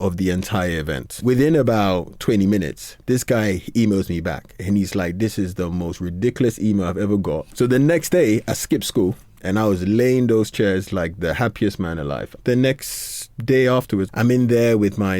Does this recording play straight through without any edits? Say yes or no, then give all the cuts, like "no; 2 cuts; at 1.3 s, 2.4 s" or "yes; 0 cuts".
no; 5 cuts; at 1.2 s, 7.5 s, 9.4 s, 12.3 s, 14.1 s